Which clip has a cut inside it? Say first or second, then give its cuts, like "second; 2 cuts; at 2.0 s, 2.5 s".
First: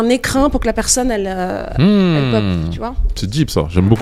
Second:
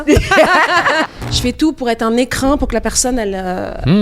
second; 1 cut; at 1.1 s